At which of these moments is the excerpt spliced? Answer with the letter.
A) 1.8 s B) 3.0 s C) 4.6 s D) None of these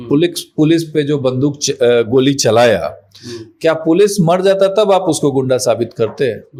D